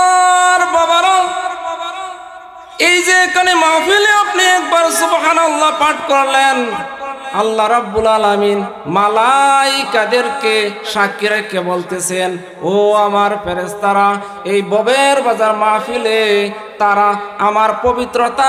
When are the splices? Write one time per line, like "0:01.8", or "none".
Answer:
none